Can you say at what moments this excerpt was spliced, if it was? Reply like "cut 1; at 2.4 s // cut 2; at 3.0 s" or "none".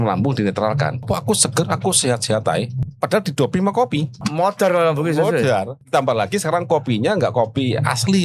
cut 1; at 1.0 s // cut 2; at 2.8 s // cut 3; at 4.1 s // cut 4; at 5.8 s